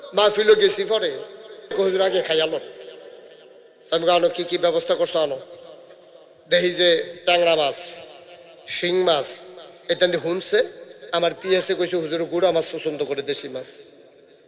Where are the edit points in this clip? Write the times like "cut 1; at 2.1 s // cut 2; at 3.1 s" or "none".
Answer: cut 1; at 1.7 s